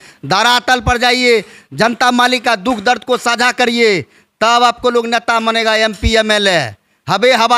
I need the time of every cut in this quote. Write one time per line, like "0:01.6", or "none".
none